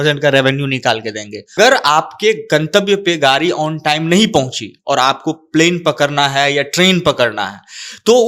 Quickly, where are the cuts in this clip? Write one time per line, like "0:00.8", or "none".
0:01.5